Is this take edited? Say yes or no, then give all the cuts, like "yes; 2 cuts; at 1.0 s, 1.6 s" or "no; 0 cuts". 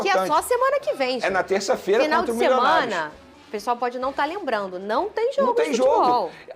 no; 0 cuts